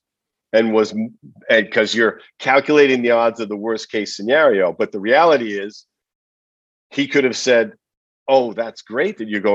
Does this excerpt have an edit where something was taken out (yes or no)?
no